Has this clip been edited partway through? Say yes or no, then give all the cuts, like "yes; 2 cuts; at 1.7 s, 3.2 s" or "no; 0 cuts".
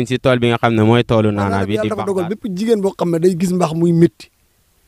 yes; 1 cut; at 1.8 s